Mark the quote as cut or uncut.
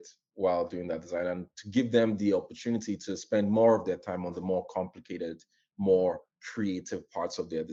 uncut